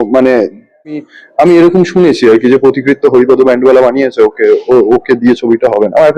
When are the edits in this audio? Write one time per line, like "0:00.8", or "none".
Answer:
0:01.0